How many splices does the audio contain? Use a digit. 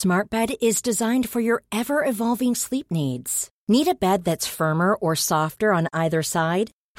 0